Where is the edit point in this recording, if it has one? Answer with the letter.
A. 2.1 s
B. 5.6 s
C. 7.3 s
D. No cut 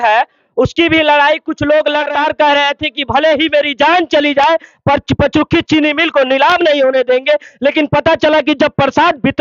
A